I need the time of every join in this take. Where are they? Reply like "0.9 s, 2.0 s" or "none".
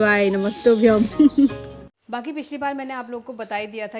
1.9 s